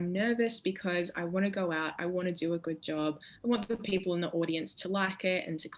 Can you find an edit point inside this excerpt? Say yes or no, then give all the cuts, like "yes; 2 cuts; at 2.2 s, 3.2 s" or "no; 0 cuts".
no; 0 cuts